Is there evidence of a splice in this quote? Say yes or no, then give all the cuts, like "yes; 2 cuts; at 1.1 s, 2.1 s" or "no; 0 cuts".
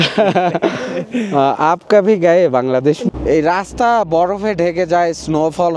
yes; 1 cut; at 3.0 s